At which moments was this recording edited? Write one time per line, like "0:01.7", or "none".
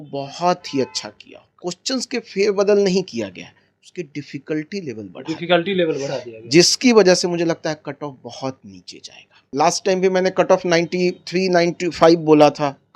0:01.5
0:09.4